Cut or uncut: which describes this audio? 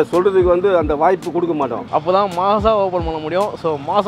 cut